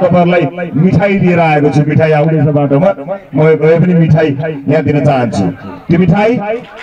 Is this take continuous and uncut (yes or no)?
yes